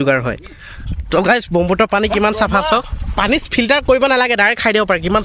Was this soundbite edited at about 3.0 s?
yes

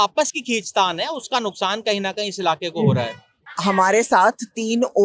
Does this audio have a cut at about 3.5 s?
yes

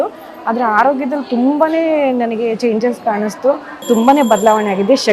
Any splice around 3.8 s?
yes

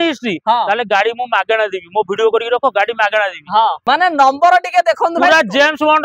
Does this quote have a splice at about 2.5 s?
no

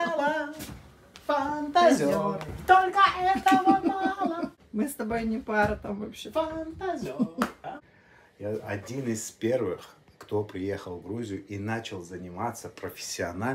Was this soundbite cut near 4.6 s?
yes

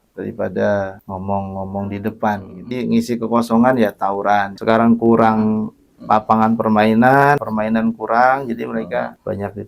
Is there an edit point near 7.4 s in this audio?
yes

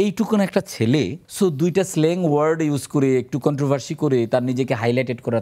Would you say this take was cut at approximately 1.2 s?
yes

